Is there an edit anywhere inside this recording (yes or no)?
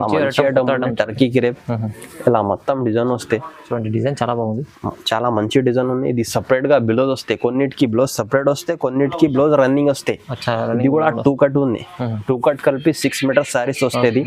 no